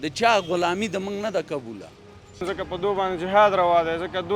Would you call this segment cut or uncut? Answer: cut